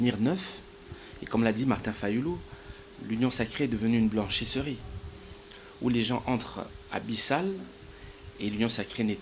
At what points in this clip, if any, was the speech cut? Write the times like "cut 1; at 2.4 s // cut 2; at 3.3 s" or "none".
none